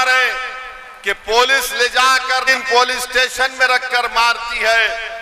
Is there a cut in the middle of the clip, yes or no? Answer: yes